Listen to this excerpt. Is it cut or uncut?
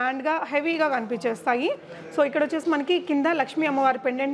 uncut